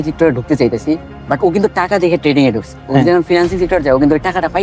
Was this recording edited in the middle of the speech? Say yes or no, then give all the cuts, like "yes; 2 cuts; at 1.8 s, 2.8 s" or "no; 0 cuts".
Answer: no; 0 cuts